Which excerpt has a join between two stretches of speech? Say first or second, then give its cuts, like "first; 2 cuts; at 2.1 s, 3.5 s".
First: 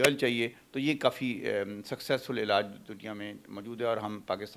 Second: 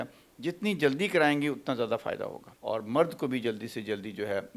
second; 1 cut; at 2.5 s